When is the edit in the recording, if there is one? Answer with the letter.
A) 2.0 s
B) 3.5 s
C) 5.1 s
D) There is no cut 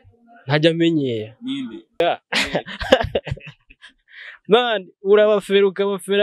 A